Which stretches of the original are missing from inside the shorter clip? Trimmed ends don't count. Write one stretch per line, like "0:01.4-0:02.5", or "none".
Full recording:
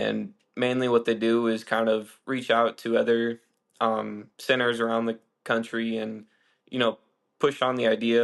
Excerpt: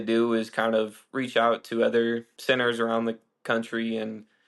0:03.4-0:04.3